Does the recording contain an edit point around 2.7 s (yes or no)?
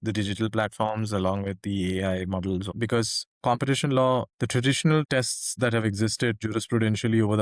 yes